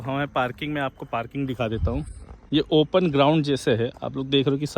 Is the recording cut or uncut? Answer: uncut